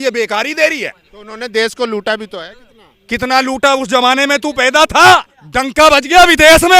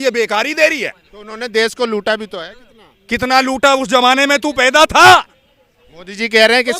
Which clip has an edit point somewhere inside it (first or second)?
first